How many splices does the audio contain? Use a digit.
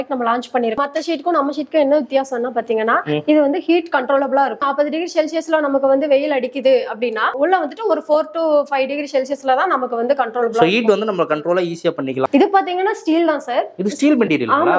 4